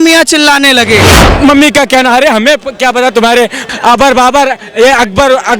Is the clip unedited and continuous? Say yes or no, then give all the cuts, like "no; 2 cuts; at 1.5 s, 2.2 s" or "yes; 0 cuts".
no; 2 cuts; at 1.2 s, 3.7 s